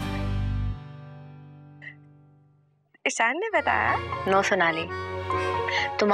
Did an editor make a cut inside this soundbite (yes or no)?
yes